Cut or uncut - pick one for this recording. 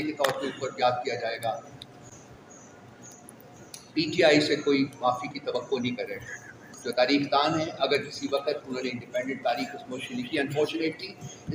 uncut